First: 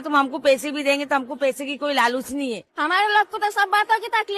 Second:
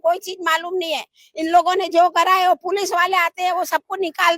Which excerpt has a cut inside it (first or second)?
first